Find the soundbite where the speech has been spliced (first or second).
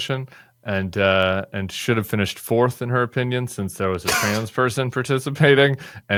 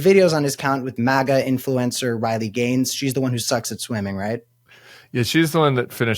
second